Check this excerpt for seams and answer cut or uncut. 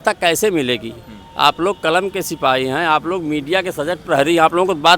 uncut